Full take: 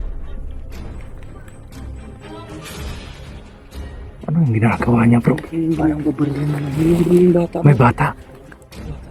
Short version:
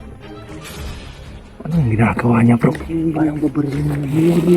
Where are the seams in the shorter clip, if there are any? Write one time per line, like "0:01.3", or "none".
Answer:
0:01.5